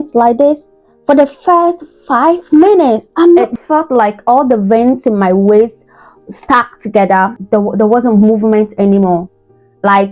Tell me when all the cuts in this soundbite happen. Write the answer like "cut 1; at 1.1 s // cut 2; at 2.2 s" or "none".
cut 1; at 3.5 s // cut 2; at 7.4 s